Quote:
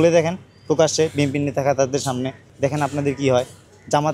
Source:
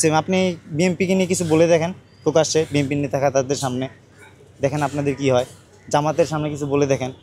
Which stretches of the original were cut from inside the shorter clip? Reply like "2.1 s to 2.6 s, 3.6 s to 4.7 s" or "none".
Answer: 4.0 s to 4.4 s